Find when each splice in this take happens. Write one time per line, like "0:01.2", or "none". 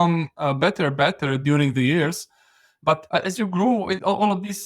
0:03.0